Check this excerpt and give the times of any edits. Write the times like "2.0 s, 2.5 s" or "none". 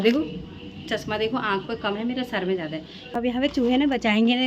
3.3 s